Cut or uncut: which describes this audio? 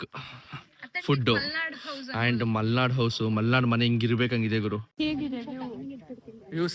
cut